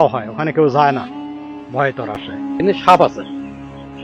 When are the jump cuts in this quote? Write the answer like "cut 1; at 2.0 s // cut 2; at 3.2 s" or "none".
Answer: cut 1; at 2.2 s